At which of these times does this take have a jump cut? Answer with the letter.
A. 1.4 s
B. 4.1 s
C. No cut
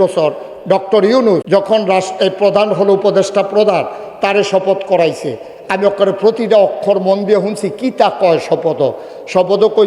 A